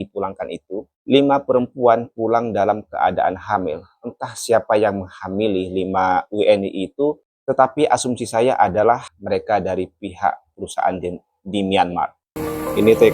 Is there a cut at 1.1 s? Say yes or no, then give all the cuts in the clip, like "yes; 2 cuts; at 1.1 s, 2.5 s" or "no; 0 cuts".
no; 3 cuts; at 7.3 s, 9.1 s, 12.3 s